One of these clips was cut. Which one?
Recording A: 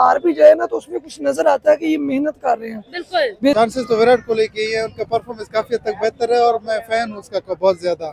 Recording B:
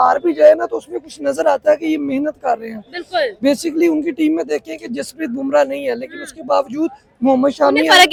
A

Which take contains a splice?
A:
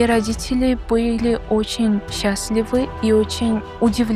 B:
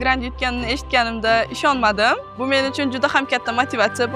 B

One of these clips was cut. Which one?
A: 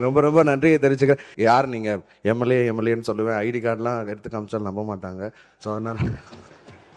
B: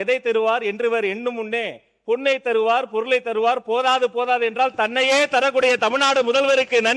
A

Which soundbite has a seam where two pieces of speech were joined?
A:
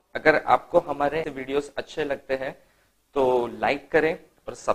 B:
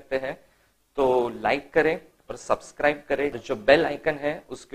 A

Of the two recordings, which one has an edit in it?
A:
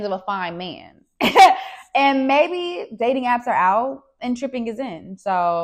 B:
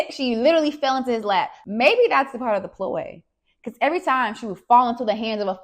B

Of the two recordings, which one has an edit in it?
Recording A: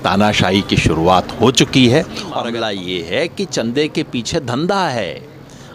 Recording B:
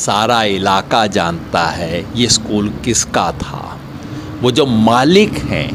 A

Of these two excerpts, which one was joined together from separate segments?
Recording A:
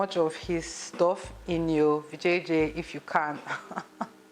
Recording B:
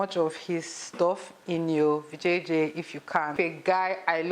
B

